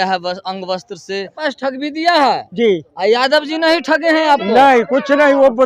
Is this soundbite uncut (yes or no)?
no